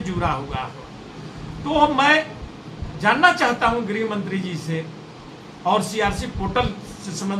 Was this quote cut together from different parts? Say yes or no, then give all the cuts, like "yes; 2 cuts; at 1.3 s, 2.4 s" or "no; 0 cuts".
no; 0 cuts